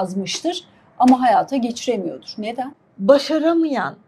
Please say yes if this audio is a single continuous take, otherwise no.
no